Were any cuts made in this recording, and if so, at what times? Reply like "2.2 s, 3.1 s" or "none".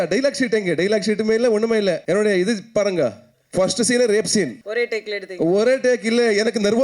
2.0 s, 4.6 s